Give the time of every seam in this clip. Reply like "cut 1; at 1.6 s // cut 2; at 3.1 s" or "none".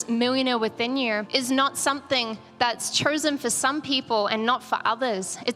cut 1; at 1.3 s